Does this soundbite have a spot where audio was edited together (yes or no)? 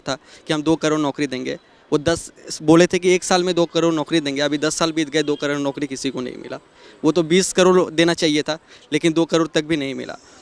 no